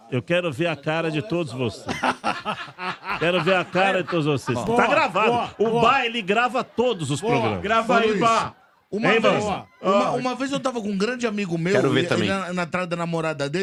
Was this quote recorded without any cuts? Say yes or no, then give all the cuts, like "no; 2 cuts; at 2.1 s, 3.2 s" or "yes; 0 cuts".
yes; 0 cuts